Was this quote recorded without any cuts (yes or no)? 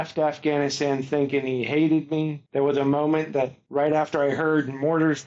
no